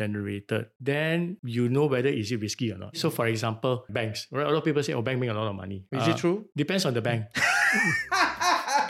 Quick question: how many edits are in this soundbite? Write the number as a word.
three